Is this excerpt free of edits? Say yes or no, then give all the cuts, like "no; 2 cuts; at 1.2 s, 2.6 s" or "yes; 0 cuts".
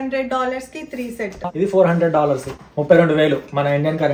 no; 2 cuts; at 1.4 s, 2.5 s